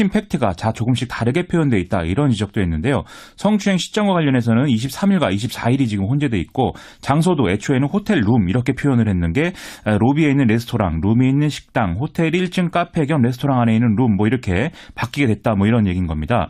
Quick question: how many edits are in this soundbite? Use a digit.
1